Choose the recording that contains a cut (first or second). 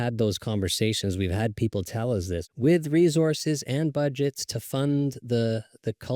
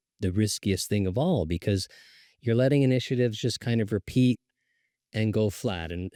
first